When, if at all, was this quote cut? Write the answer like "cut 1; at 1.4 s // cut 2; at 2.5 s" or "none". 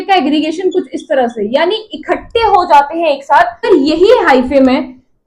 cut 1; at 3.6 s